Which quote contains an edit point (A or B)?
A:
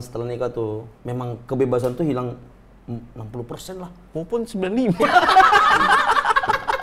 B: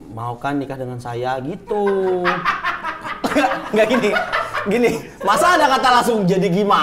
A